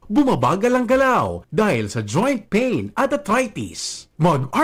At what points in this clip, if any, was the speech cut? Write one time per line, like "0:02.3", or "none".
none